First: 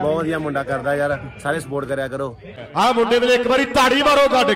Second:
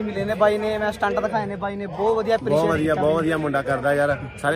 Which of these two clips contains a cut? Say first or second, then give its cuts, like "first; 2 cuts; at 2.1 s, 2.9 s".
first; 1 cut; at 2.6 s